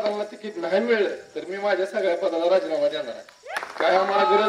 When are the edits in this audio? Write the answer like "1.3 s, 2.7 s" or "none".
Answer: 3.5 s